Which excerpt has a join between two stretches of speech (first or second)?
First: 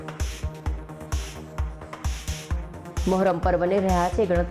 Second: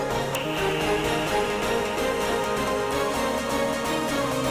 first